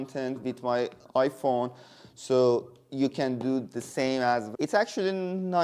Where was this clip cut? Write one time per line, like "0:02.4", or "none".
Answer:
0:04.5